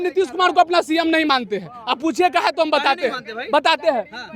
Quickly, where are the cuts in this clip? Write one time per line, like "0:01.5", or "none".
none